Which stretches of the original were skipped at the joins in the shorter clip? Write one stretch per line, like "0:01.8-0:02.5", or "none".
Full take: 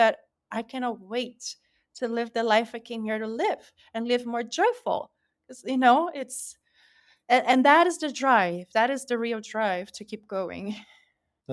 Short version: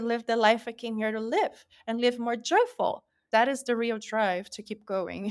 0:05.3-0:08.6